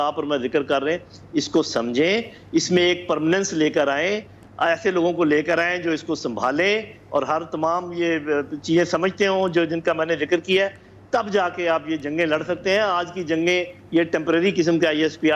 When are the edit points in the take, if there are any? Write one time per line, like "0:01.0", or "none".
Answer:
none